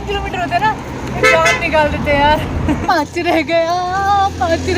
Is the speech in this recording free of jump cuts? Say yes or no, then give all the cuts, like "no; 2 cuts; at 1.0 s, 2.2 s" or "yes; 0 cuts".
no; 1 cut; at 2.8 s